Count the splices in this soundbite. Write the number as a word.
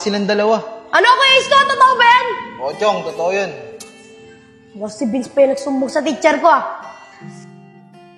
one